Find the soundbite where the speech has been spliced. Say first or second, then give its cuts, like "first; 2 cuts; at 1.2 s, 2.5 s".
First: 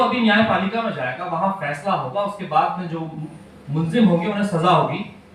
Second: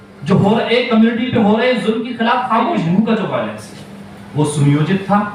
second; 1 cut; at 2.8 s